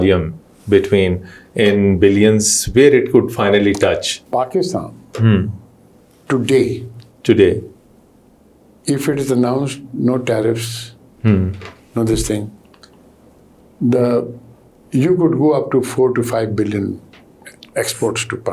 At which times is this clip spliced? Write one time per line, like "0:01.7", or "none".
0:04.1